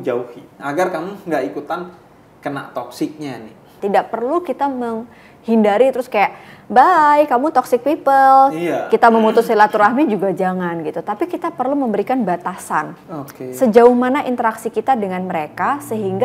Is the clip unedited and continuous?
no; 1 cut; at 3.7 s

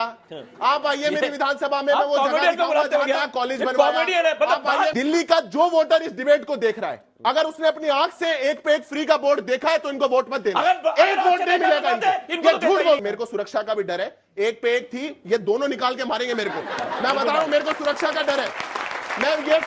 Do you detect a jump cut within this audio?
yes; 2 cuts; at 4.9 s, 13.0 s

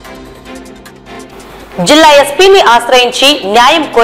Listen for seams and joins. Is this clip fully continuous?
no; 1 cut; at 1.1 s

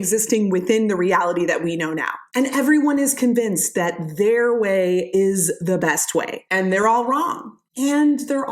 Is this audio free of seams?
no; 1 cut; at 6.4 s

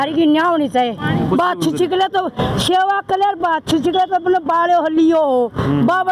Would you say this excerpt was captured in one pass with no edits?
no; 1 cut; at 1.3 s

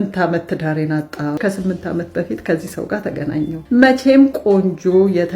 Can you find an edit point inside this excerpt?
yes; 2 cuts; at 1.4 s, 3.6 s

